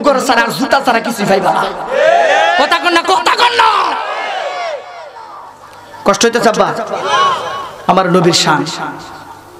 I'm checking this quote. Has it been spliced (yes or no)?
no